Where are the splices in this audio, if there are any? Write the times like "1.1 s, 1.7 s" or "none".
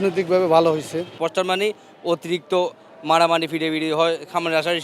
1.2 s

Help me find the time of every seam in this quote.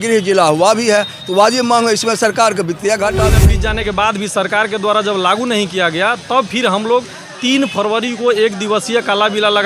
3.4 s

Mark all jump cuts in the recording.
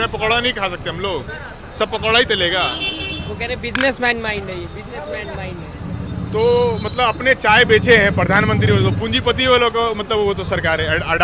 none

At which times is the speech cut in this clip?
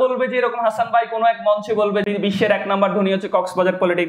2.0 s

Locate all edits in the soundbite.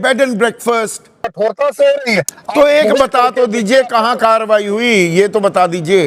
1.3 s

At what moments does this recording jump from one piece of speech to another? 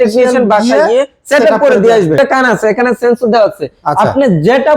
2.2 s

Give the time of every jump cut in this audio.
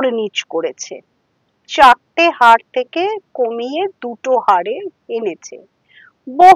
none

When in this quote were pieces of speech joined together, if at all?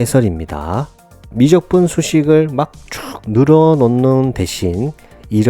1.2 s

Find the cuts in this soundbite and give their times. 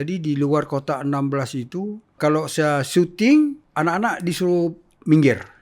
2.2 s, 3.6 s

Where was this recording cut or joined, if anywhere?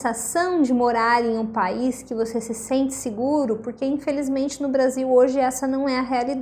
none

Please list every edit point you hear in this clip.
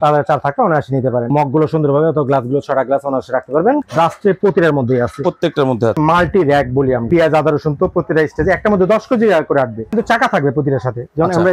1.3 s, 3.9 s, 6.0 s, 7.1 s, 9.9 s

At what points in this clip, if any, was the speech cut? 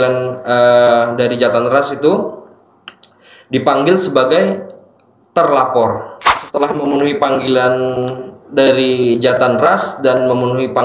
6.4 s

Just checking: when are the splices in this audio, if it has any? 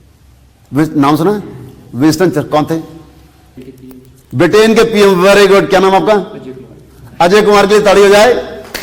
3.6 s

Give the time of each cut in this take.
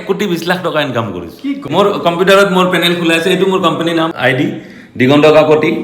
1.7 s, 4.1 s

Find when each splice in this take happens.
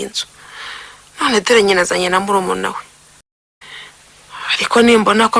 3.2 s

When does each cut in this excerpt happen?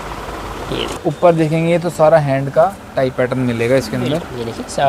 1.0 s

